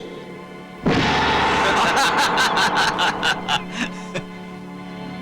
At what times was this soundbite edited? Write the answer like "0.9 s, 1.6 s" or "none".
none